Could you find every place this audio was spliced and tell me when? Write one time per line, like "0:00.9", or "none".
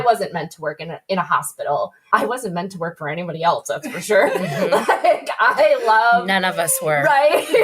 0:02.0